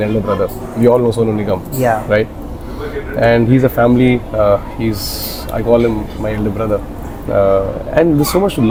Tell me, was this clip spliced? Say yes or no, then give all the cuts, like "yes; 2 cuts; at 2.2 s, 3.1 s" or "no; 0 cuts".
no; 0 cuts